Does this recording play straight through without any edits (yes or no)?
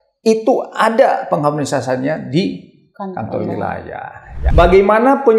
no